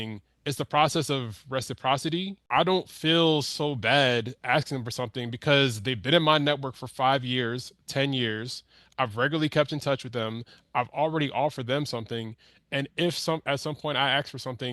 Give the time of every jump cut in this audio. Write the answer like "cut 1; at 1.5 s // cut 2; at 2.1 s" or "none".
cut 1; at 2.4 s

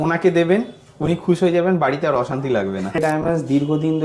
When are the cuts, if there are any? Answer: cut 1; at 3.0 s

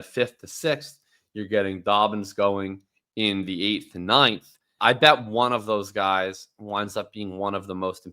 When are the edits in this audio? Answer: cut 1; at 4.7 s

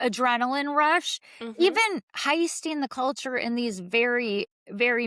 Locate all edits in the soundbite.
none

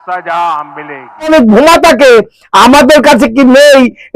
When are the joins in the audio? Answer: cut 1; at 1.3 s

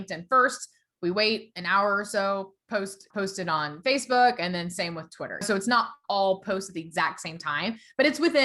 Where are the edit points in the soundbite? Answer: cut 1; at 3.0 s // cut 2; at 5.4 s

